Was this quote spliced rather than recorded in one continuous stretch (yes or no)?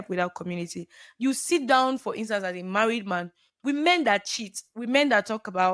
yes